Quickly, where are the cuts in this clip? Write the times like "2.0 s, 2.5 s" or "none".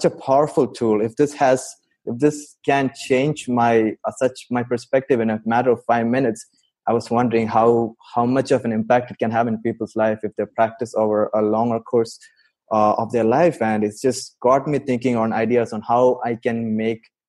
none